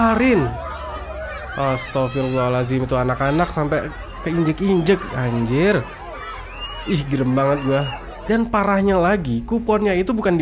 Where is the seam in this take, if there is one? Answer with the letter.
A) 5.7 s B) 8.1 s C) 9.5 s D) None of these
B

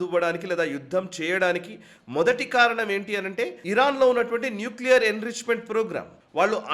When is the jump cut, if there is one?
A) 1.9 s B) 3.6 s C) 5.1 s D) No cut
B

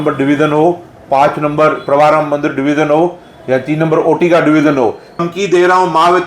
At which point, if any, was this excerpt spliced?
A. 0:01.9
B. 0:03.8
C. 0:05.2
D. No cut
C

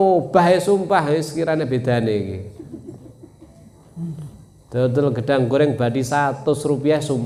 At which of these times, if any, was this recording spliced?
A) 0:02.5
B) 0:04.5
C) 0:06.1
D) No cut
D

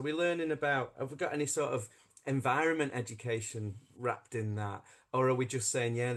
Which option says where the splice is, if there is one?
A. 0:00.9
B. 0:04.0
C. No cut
C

